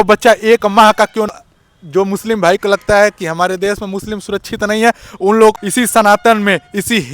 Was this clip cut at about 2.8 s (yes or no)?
no